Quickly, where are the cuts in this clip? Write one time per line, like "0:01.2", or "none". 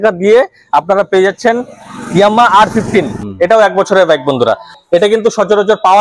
0:03.2
0:04.7